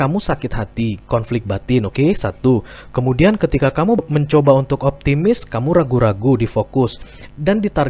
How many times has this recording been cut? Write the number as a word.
zero